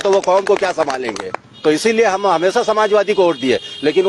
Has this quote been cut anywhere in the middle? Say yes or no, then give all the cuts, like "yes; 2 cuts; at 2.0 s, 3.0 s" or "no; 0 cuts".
yes; 1 cut; at 1.5 s